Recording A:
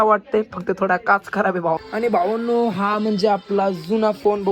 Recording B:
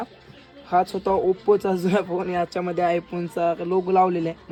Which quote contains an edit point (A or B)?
A